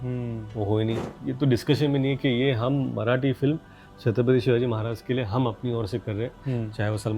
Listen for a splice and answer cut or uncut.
cut